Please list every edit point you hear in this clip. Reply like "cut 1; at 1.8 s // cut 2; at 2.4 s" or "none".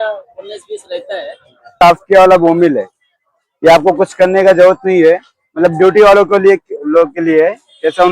cut 1; at 1.7 s

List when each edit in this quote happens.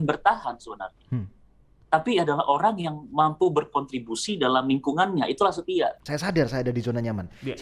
cut 1; at 6.0 s

